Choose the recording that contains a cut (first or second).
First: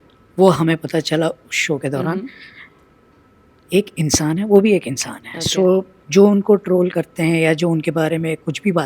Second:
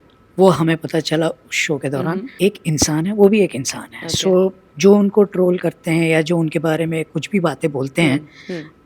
second